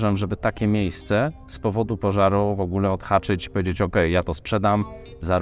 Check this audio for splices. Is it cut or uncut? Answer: uncut